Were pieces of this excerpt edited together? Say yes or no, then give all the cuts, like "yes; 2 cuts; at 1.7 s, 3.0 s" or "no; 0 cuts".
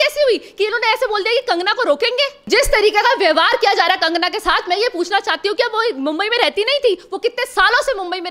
yes; 1 cut; at 2.4 s